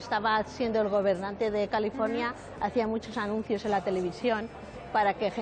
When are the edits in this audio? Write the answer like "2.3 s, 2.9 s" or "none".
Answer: none